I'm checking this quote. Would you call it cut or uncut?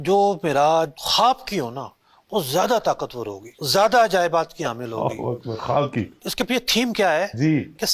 uncut